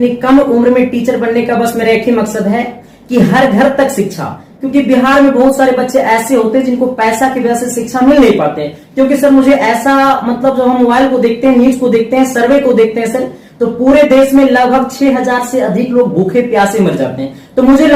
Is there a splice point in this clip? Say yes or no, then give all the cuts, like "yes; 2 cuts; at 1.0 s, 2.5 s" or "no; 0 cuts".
no; 0 cuts